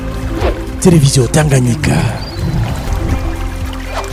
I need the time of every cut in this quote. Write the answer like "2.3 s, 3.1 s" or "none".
none